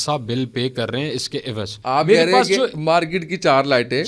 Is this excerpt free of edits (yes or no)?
no